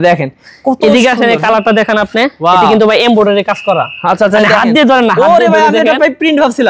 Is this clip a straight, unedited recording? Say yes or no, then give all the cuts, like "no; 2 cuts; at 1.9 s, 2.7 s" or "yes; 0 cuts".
yes; 0 cuts